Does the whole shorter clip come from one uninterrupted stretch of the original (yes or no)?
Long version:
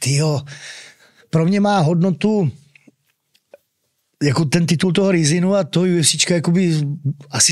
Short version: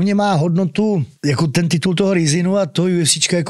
no